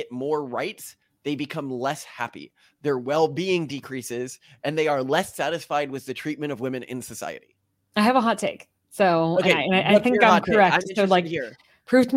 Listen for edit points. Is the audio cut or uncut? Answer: uncut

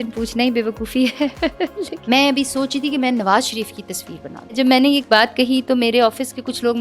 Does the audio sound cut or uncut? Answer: cut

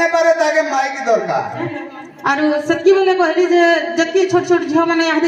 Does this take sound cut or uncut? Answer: cut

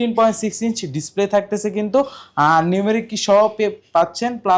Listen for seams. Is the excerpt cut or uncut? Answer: uncut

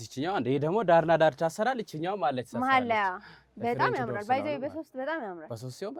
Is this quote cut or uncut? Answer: uncut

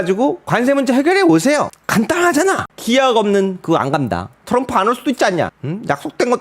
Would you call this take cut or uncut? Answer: cut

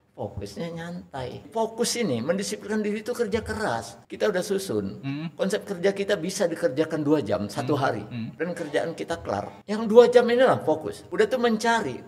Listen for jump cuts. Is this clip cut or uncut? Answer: cut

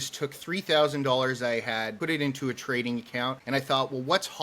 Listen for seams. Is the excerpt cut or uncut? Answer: cut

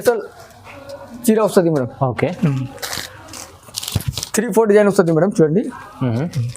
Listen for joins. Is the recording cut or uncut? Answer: cut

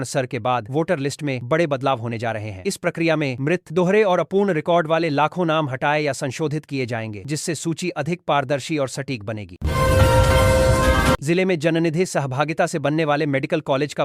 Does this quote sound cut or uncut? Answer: cut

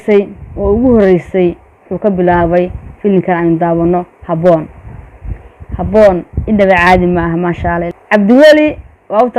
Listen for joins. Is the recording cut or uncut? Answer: cut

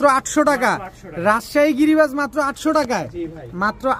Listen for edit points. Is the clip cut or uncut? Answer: uncut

